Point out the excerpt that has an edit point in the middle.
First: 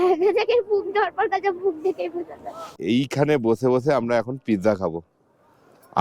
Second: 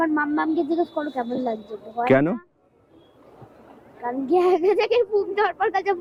first; 1 cut; at 2.8 s

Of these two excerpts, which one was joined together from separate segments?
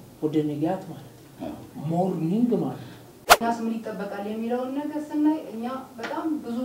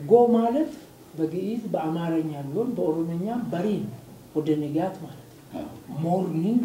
first; 1 cut; at 3.5 s

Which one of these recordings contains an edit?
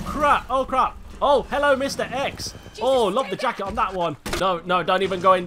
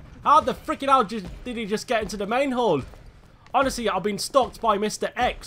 first; 1 cut; at 4.3 s

